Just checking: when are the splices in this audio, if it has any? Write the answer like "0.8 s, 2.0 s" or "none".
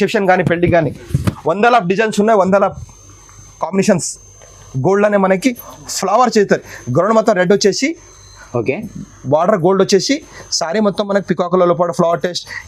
none